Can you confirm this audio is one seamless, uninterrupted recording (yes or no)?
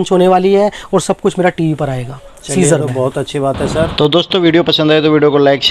yes